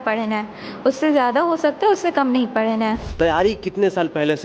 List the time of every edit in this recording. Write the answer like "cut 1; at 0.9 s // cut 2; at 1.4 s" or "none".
cut 1; at 3.0 s